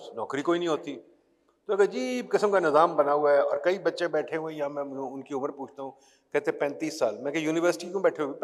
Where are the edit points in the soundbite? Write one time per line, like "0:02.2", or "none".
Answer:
none